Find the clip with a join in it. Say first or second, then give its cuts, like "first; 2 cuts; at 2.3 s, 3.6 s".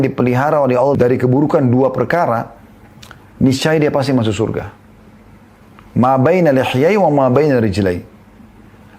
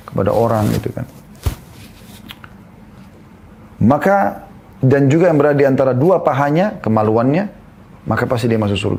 first; 1 cut; at 0.9 s